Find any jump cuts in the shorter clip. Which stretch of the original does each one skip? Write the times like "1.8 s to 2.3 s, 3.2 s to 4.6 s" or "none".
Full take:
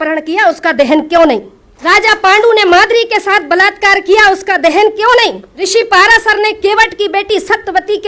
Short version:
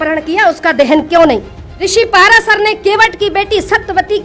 1.7 s to 5.4 s

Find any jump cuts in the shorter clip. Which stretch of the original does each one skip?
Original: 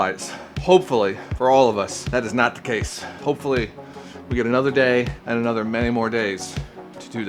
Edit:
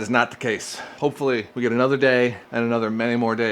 3.7 s to 4.2 s

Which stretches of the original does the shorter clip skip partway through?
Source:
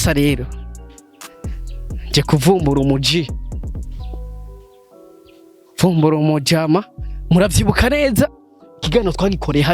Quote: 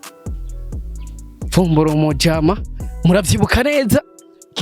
2.1 s to 5.2 s

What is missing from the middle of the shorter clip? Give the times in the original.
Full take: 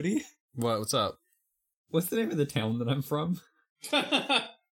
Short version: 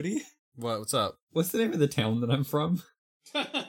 1.2 s to 1.8 s

